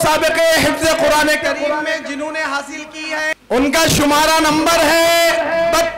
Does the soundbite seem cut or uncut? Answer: cut